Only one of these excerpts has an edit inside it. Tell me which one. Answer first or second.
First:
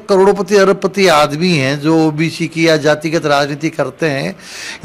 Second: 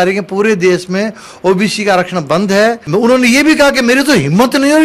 second